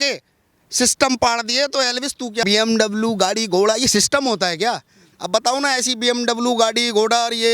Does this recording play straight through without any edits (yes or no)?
yes